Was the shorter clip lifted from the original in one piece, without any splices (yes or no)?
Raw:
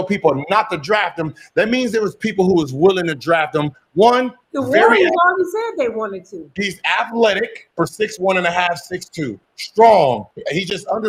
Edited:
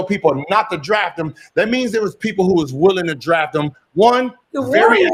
yes